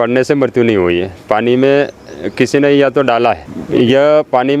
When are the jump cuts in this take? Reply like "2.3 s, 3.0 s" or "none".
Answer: 3.5 s